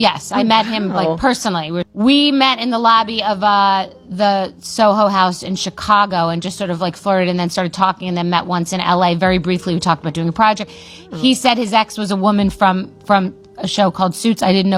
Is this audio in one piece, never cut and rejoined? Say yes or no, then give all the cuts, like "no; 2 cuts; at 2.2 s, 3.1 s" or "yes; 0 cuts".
yes; 0 cuts